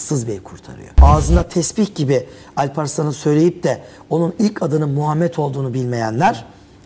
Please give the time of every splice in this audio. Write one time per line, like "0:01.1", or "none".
0:00.9

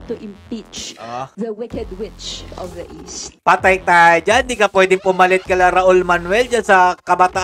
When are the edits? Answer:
0:01.3
0:03.2

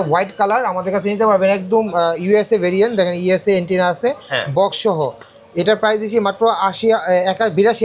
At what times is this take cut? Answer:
none

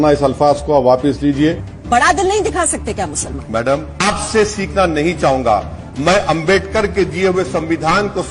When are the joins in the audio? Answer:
0:01.6
0:03.9

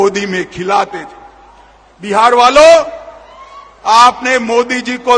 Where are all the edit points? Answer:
none

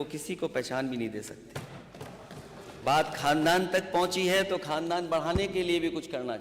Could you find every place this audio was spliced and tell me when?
0:02.8

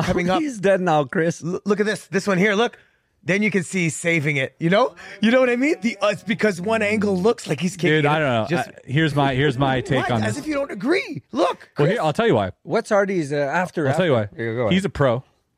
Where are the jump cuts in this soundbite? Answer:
none

